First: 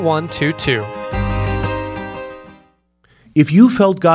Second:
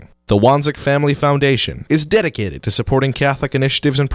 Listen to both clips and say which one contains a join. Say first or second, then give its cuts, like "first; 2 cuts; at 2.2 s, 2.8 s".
first; 1 cut; at 2.9 s